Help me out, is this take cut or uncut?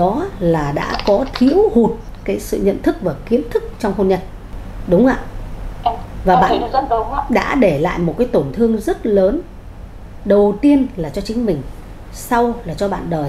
uncut